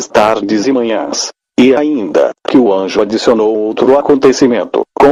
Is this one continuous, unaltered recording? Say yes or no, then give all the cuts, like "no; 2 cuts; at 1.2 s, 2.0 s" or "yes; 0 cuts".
yes; 0 cuts